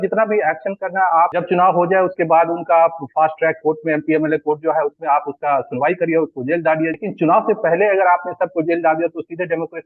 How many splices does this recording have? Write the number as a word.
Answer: two